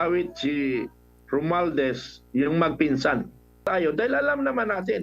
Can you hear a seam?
yes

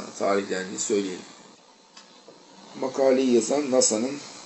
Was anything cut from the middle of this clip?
yes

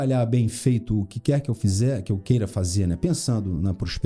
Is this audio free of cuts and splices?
yes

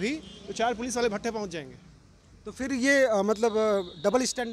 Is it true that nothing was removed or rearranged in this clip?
yes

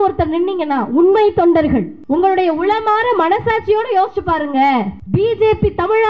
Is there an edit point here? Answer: yes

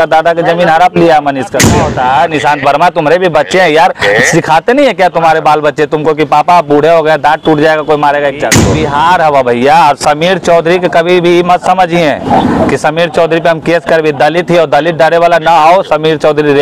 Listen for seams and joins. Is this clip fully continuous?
no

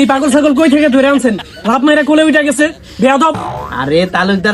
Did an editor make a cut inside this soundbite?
no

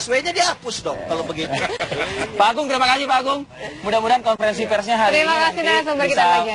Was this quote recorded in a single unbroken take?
yes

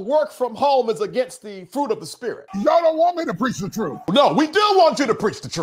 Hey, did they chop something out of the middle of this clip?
yes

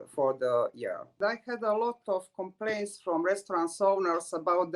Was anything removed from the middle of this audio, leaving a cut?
yes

